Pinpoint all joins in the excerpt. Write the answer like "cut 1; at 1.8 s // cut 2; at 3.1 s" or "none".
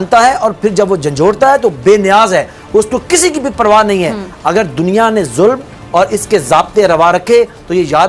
none